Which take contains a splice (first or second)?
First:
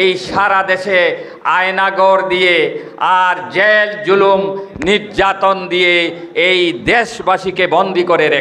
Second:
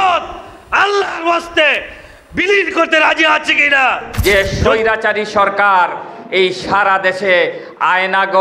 second